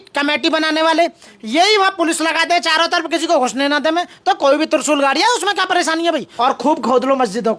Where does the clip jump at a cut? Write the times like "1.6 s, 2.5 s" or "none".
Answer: 6.3 s